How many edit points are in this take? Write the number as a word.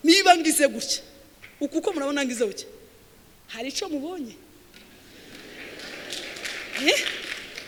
zero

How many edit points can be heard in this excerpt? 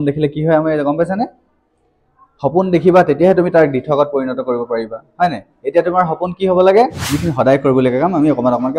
one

